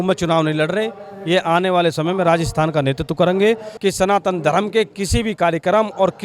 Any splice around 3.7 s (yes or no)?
yes